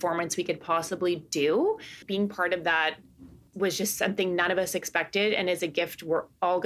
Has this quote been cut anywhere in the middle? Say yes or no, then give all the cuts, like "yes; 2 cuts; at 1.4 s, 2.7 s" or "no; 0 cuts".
yes; 1 cut; at 2.0 s